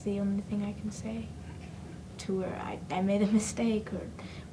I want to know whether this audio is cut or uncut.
uncut